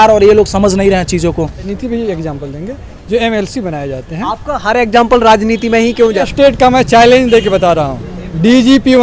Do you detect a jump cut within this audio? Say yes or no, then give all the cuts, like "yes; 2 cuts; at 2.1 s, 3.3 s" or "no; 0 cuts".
yes; 2 cuts; at 1.7 s, 6.3 s